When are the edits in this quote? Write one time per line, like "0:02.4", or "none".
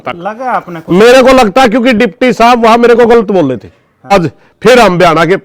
0:04.1